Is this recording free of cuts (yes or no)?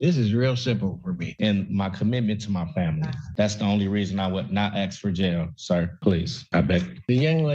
no